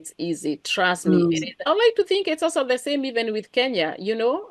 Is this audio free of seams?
yes; 0 cuts

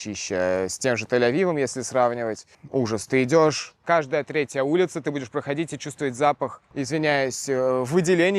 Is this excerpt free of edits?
no; 2 cuts; at 2.5 s, 3.8 s

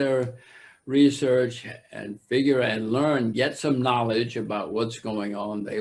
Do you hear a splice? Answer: no; 0 cuts

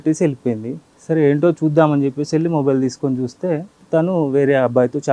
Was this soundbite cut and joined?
no; 0 cuts

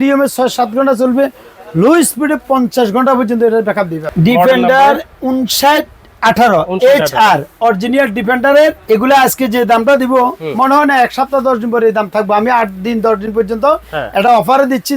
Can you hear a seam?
yes; 2 cuts; at 4.0 s, 8.8 s

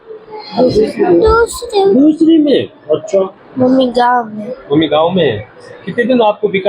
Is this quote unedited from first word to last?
no; 1 cut; at 3.4 s

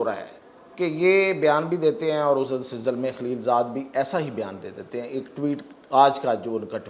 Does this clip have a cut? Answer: no; 0 cuts

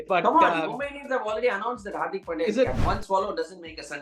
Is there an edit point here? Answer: yes; 1 cut; at 2.8 s

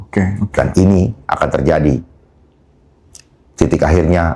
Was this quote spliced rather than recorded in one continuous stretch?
no; 0 cuts

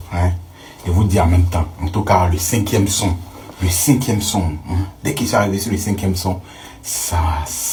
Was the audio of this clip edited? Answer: no; 0 cuts

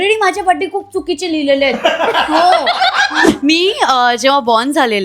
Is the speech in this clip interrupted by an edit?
yes; 1 cut; at 3.3 s

